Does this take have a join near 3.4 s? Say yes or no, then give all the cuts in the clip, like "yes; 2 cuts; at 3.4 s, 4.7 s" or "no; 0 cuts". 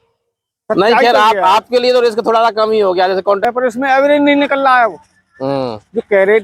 yes; 1 cut; at 3.4 s